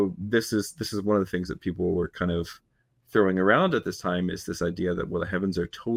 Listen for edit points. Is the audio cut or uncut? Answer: uncut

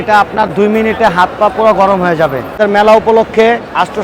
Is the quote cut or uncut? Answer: cut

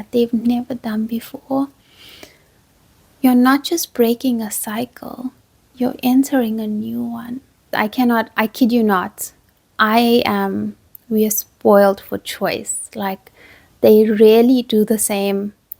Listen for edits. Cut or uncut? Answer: cut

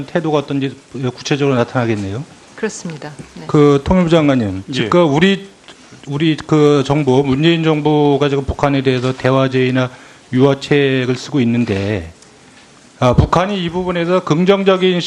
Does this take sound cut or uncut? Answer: uncut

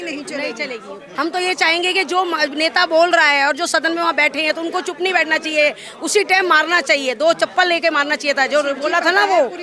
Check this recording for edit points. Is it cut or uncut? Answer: cut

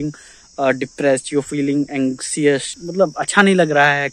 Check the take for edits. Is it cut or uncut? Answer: uncut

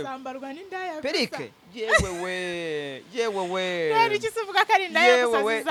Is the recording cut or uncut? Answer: uncut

